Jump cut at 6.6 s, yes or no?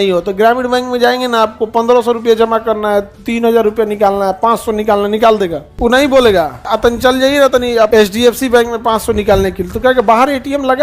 yes